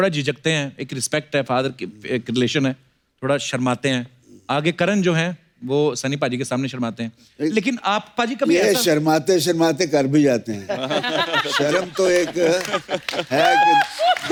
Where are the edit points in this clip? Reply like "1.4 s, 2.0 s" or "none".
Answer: none